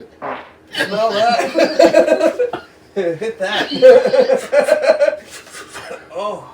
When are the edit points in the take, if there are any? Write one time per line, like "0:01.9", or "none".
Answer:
0:02.0